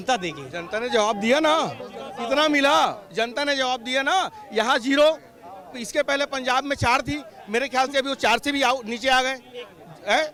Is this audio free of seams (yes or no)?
yes